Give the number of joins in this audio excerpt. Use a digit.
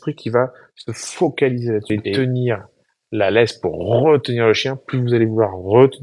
1